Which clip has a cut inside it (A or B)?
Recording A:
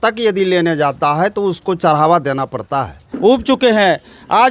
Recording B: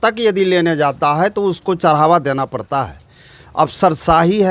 A